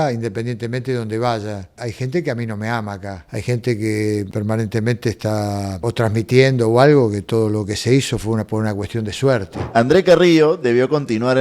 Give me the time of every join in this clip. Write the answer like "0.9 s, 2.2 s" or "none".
1.8 s, 3.2 s, 4.3 s, 5.8 s, 9.6 s